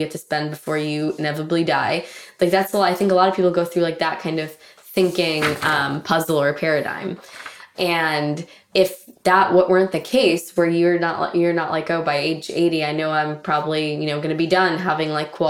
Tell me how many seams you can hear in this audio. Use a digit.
0